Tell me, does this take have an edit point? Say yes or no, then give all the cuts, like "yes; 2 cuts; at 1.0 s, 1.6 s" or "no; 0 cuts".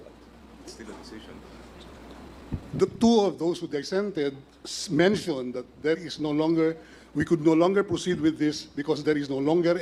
no; 0 cuts